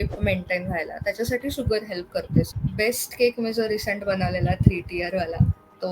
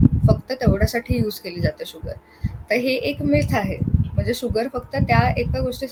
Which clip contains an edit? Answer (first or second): first